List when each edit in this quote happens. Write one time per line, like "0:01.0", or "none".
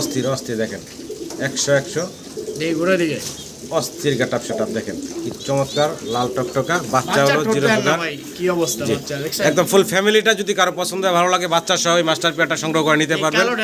none